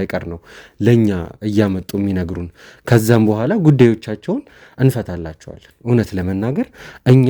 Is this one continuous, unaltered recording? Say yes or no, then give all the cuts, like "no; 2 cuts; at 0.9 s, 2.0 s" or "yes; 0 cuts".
yes; 0 cuts